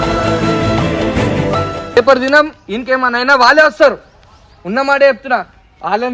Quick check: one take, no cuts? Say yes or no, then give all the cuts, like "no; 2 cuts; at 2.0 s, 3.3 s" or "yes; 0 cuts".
no; 1 cut; at 2.0 s